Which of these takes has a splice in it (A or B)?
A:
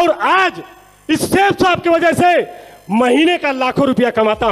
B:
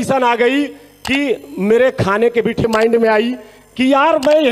B